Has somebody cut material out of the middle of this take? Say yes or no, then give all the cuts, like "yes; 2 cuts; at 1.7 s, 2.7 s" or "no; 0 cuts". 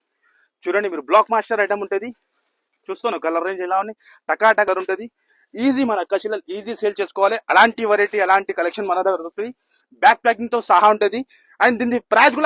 yes; 1 cut; at 4.7 s